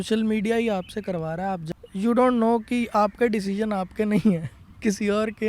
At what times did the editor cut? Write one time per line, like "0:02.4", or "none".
0:01.6